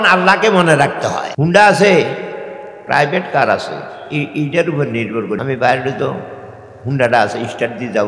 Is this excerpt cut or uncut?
cut